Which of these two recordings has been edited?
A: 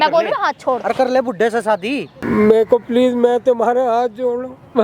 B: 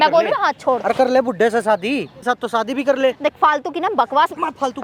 A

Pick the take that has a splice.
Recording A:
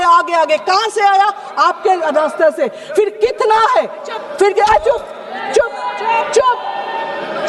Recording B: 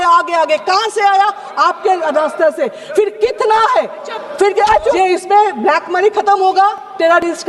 B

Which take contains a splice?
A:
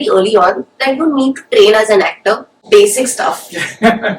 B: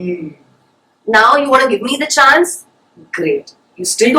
A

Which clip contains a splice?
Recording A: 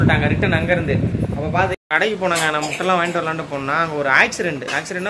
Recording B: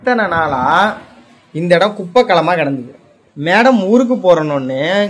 A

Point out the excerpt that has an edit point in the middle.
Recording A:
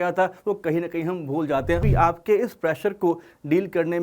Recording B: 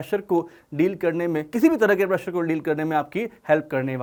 A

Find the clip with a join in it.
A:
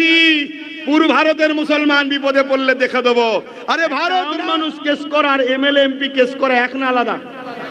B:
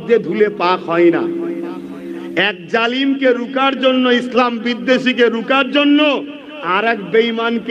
A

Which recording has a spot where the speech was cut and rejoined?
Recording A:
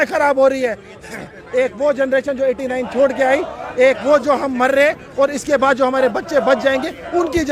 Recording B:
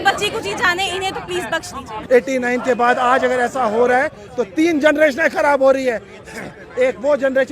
B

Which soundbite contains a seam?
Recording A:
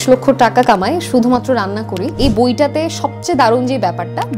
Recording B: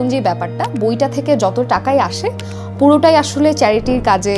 A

